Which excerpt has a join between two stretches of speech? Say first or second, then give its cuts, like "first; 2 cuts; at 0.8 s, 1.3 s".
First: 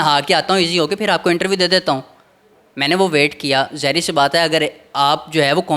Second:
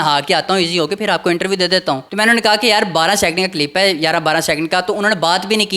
second; 1 cut; at 2.1 s